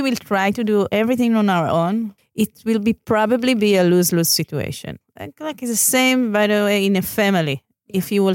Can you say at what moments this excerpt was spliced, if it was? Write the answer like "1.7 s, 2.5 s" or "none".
0.9 s, 2.2 s, 5.0 s